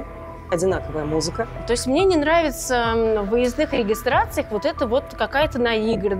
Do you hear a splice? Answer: yes; 1 cut; at 1.6 s

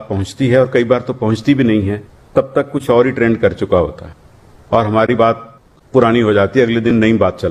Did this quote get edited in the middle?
no; 0 cuts

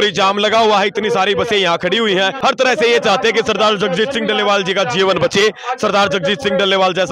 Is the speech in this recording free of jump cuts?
no; 1 cut; at 2.3 s

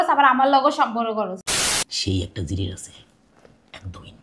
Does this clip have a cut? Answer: yes; 1 cut; at 1.4 s

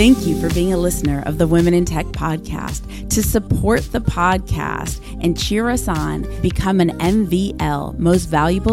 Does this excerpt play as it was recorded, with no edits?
yes; 0 cuts

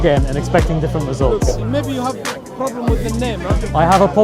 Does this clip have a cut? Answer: yes; 1 cut; at 1.6 s

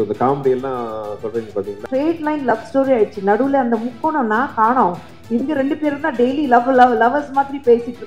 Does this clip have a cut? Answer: yes; 1 cut; at 1.8 s

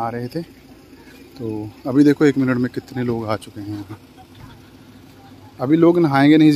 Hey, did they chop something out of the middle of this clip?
no; 0 cuts

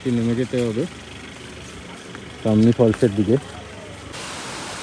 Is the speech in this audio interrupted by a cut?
no; 0 cuts

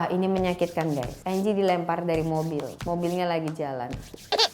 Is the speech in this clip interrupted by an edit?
yes; 2 cuts; at 1.1 s, 2.7 s

